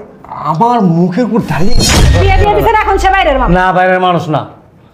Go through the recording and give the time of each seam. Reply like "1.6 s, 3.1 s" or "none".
1.9 s